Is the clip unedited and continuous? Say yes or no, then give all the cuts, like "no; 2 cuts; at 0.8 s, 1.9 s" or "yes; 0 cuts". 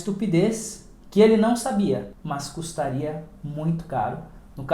no; 1 cut; at 2.1 s